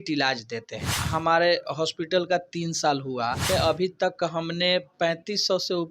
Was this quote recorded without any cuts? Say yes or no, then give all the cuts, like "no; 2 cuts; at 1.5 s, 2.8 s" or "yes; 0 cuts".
no; 2 cuts; at 1.0 s, 3.4 s